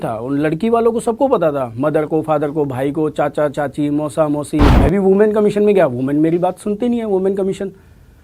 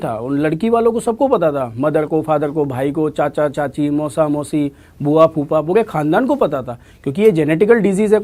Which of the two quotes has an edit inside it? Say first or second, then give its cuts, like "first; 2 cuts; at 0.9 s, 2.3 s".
first; 1 cut; at 4.8 s